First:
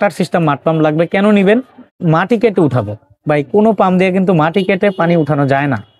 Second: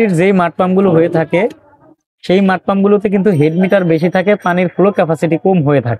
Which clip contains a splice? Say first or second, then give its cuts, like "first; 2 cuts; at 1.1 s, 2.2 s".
first; 1 cut; at 1.9 s